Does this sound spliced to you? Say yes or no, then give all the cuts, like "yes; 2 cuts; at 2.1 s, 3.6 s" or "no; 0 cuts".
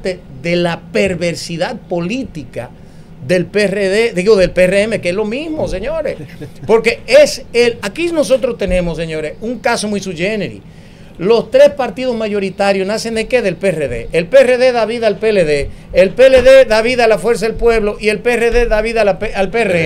no; 0 cuts